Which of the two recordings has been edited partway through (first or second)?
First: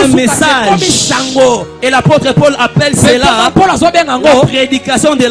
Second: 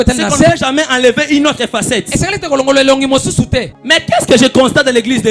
second